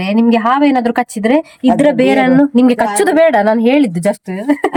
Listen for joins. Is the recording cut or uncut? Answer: uncut